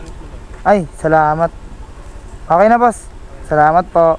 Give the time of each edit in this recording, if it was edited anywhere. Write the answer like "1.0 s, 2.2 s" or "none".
none